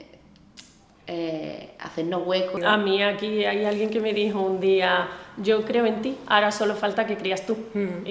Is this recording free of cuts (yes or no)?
no